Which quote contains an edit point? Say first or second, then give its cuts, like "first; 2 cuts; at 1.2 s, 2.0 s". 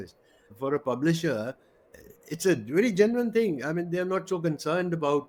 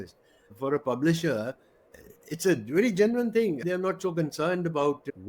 second; 1 cut; at 3.6 s